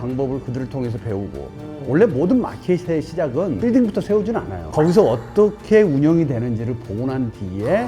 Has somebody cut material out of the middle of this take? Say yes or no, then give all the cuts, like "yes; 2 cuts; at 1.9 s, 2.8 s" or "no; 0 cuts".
no; 0 cuts